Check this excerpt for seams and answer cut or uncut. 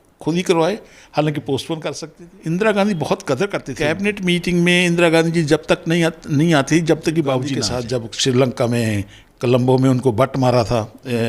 cut